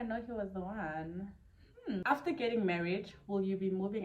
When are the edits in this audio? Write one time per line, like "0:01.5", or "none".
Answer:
0:02.0